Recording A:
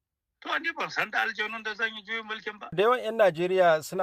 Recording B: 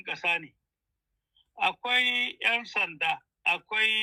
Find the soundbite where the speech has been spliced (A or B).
A